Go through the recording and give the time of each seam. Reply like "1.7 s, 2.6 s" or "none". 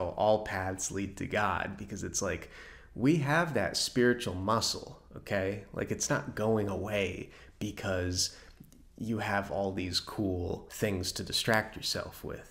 10.7 s